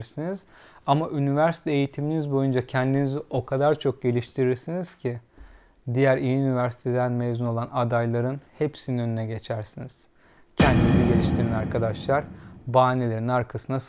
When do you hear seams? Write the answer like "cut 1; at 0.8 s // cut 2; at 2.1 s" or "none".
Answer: none